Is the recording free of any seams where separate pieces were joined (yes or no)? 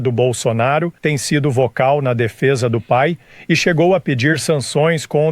no